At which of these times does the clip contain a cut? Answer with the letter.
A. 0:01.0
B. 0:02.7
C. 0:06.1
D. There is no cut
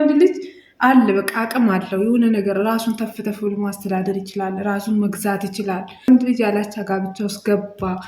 C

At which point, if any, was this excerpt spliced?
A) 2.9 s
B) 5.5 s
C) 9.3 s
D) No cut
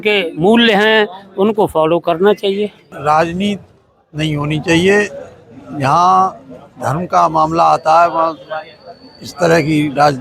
A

